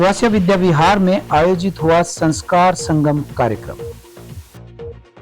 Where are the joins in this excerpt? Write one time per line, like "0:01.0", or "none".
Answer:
0:03.7